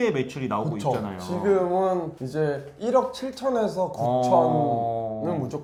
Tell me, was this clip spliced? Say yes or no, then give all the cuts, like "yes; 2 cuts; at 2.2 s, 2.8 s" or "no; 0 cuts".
no; 0 cuts